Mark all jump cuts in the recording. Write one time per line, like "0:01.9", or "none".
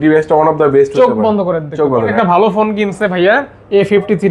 0:02.1